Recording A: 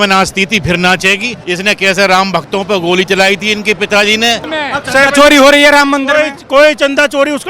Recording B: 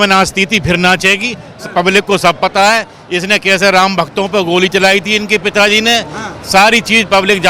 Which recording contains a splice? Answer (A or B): A